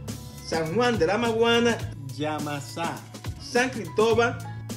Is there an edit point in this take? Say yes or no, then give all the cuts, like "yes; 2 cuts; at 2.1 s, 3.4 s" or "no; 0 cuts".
no; 0 cuts